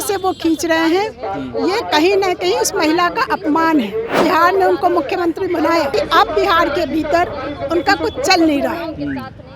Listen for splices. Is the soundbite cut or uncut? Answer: cut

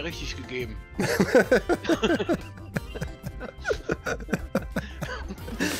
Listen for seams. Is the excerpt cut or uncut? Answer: uncut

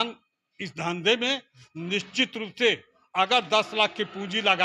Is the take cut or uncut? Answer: uncut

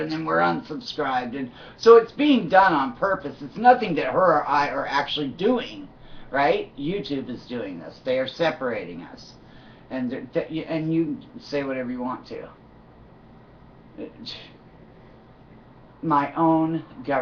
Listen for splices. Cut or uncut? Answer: cut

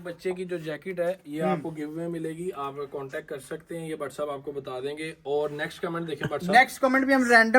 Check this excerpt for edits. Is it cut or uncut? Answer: uncut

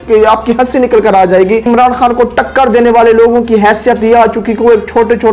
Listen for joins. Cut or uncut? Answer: cut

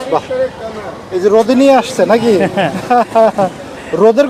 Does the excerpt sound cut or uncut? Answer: uncut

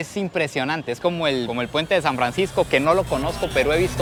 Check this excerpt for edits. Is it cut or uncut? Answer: uncut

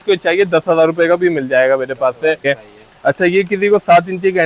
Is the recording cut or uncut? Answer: cut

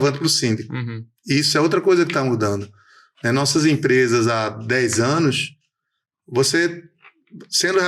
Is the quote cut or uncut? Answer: uncut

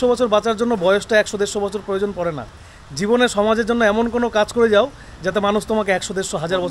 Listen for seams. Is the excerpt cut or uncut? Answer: uncut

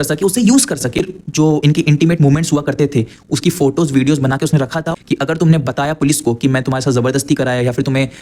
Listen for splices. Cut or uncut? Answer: cut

